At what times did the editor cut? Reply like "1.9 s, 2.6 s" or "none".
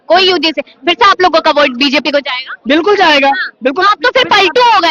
none